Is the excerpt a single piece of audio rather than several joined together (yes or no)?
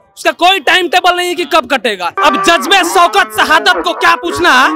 no